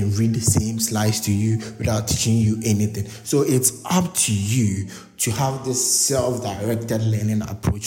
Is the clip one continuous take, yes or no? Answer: yes